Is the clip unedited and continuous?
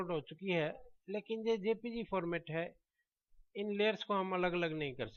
yes; 0 cuts

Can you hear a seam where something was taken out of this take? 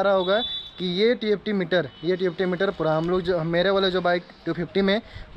no; 0 cuts

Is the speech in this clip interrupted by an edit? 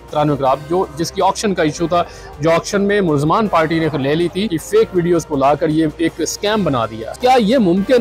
yes; 2 cuts; at 4.6 s, 7.0 s

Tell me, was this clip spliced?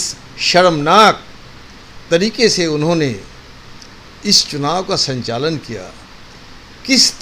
no; 0 cuts

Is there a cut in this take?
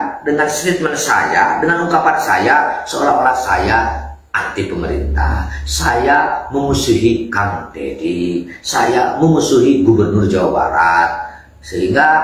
no; 0 cuts

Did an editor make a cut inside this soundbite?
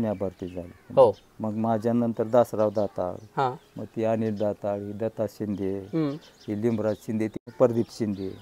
yes; 1 cut; at 7.4 s

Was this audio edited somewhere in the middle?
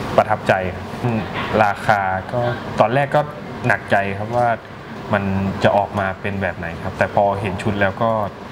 yes; 1 cut; at 1.0 s

